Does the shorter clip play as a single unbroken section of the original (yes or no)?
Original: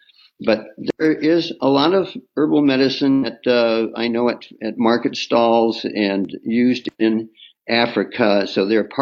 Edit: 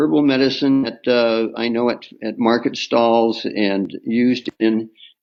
yes